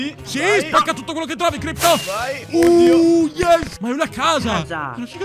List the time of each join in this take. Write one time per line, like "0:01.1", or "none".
0:03.7